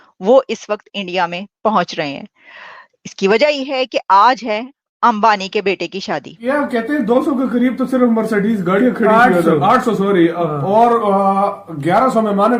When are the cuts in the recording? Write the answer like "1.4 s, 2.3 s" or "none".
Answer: 6.3 s